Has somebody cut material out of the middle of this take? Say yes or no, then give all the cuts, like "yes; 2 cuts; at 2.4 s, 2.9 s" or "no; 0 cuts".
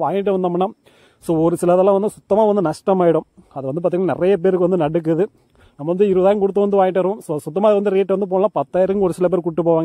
no; 0 cuts